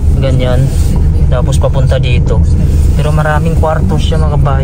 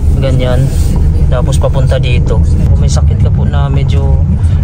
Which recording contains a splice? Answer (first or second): second